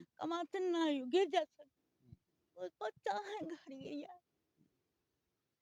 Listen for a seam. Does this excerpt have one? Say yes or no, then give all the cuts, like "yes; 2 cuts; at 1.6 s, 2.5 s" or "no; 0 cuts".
no; 0 cuts